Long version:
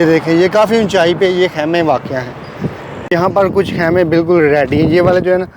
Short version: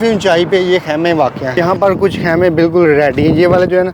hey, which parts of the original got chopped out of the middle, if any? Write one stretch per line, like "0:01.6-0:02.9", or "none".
0:02.1-0:03.0